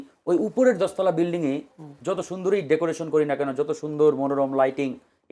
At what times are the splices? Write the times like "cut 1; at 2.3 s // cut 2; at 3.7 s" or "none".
none